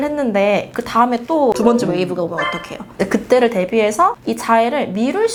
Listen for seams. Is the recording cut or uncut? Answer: uncut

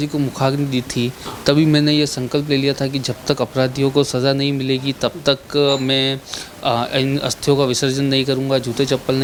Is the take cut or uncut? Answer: uncut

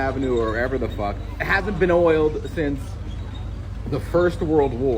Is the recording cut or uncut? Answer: uncut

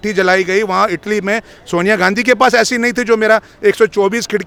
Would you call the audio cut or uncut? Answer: uncut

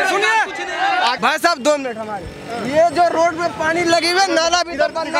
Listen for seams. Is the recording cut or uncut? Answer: uncut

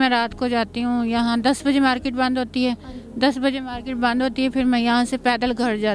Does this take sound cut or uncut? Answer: uncut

